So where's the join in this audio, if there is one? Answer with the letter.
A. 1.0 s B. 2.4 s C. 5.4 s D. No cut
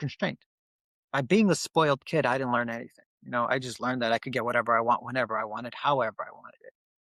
D